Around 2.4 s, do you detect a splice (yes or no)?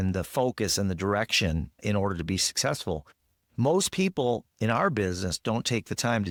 no